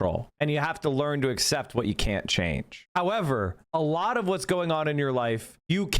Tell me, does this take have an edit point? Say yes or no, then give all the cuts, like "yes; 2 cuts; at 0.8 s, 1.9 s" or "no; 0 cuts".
no; 0 cuts